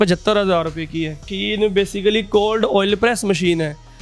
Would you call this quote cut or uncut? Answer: cut